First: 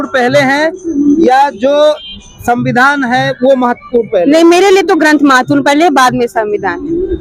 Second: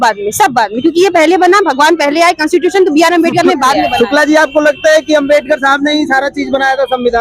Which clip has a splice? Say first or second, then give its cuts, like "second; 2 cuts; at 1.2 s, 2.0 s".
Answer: second; 1 cut; at 3.8 s